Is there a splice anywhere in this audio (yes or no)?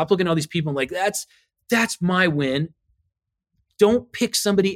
no